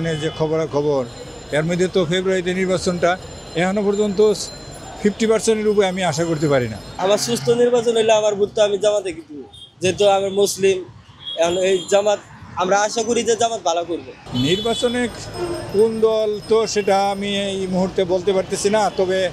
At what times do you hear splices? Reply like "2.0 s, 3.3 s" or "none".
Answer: 6.8 s, 14.2 s